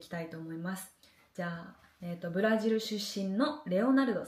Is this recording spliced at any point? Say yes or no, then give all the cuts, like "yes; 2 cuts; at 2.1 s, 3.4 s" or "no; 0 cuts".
no; 0 cuts